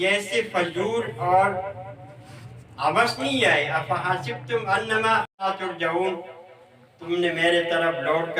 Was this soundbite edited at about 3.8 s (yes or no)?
no